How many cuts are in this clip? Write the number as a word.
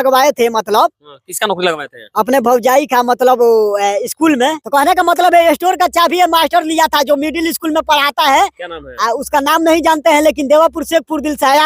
one